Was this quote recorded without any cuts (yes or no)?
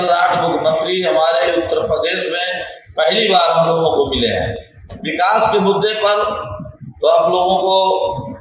yes